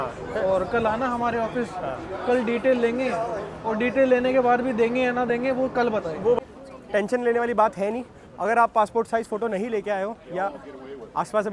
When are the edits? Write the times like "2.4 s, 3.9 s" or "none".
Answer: 6.4 s